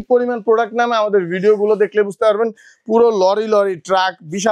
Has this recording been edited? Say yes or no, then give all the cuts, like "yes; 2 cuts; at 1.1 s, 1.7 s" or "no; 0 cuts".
no; 0 cuts